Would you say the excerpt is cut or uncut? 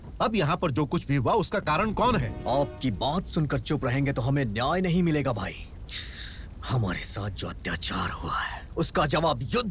cut